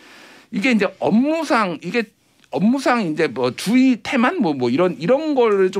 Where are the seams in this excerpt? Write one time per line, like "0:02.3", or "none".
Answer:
none